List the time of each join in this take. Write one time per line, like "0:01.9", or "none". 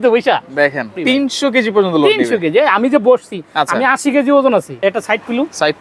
0:00.9
0:04.7